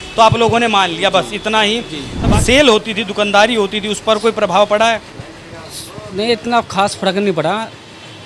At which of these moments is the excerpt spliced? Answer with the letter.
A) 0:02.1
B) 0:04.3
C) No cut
A